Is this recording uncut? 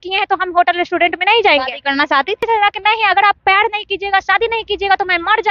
no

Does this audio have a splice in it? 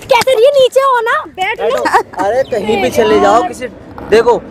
yes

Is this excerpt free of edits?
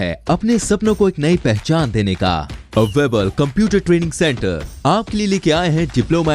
yes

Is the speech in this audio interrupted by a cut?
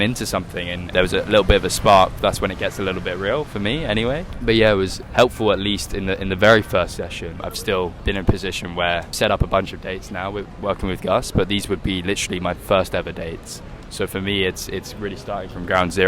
yes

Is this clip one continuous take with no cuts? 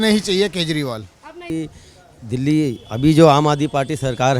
no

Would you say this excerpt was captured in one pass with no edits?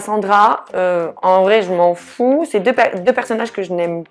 yes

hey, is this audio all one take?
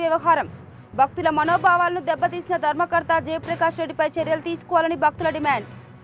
yes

